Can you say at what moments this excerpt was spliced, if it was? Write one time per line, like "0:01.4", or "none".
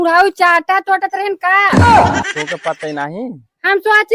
0:01.7
0:02.7